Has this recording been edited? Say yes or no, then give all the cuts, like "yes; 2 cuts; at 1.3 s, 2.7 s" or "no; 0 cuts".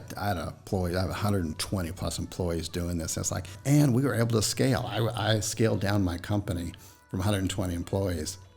yes; 1 cut; at 3.5 s